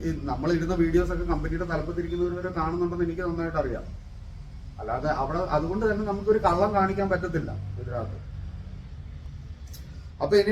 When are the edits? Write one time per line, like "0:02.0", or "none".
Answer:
none